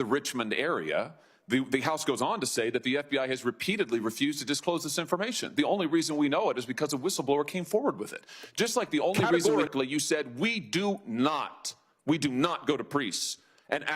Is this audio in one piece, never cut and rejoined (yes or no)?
no